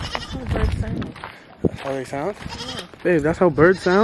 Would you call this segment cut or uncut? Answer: cut